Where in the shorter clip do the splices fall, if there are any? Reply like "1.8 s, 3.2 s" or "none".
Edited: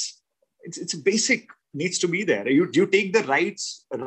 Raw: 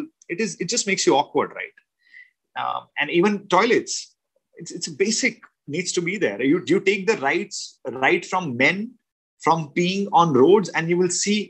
none